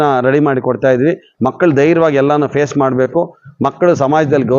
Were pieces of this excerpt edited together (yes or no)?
no